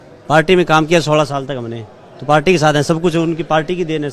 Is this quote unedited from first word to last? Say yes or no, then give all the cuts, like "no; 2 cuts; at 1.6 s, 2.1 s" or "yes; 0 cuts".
yes; 0 cuts